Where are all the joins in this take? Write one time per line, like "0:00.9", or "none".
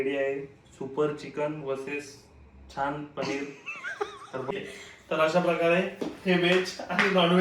0:04.5